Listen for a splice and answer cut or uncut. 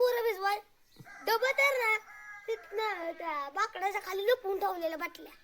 uncut